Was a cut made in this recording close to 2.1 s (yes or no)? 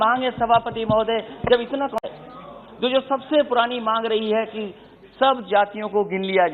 yes